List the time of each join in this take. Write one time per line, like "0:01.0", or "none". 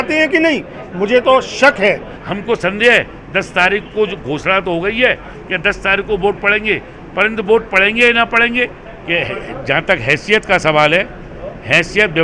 0:02.0
0:08.8